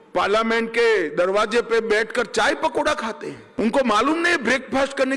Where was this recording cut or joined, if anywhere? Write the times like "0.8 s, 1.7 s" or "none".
3.4 s